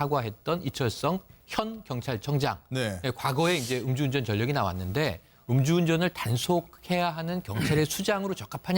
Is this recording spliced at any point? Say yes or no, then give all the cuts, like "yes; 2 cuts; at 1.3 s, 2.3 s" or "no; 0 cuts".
yes; 1 cut; at 4.7 s